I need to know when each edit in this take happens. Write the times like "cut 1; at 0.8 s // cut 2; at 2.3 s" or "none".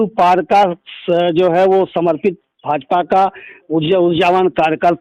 none